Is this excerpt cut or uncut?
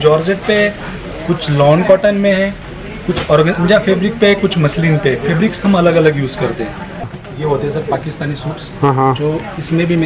cut